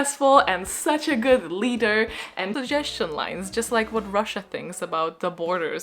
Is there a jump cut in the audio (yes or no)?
yes